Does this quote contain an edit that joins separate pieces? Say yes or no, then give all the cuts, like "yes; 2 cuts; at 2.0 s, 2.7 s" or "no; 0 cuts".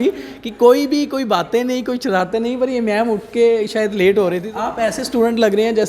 yes; 1 cut; at 4.5 s